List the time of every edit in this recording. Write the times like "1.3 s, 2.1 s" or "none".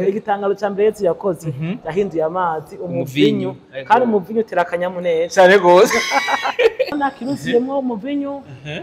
7.0 s